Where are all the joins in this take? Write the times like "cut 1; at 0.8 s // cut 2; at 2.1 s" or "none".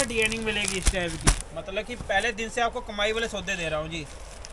cut 1; at 1.5 s